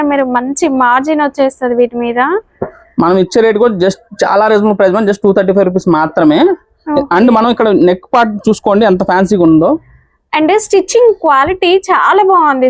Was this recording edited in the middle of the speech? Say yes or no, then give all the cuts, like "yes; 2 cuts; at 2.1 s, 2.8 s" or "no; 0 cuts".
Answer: no; 0 cuts